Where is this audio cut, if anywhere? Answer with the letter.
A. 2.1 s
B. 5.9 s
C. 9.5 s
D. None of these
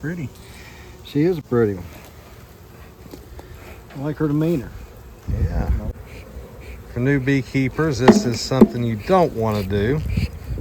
B